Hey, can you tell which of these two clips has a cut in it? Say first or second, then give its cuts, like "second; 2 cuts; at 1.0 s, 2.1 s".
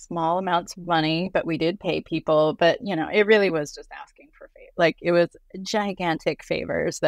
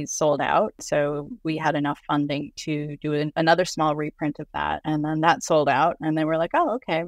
second; 3 cuts; at 0.8 s, 3.3 s, 4.8 s